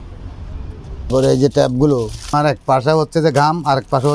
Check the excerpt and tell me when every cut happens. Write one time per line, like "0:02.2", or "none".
0:01.1
0:02.3